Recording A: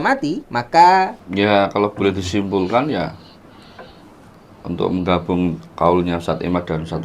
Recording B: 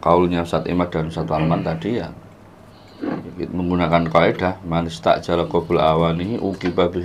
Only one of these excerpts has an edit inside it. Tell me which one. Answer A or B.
A